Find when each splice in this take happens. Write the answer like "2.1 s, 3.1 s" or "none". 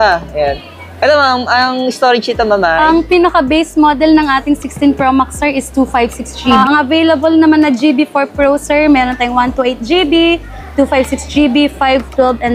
6.6 s

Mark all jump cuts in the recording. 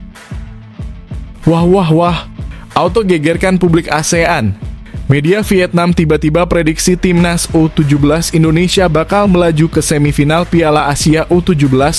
1.4 s

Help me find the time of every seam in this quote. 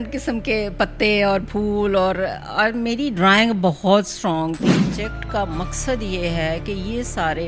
5.0 s

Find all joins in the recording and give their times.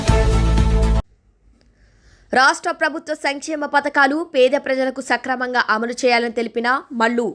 1.0 s

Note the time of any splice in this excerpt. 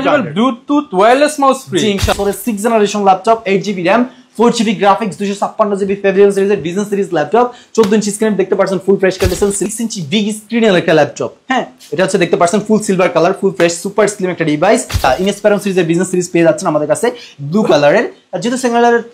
2.1 s, 9.6 s, 15.0 s

